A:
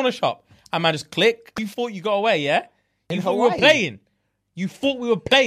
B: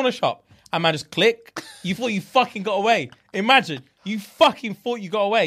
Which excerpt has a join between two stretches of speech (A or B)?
A